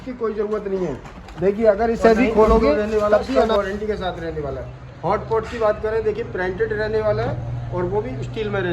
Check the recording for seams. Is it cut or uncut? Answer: cut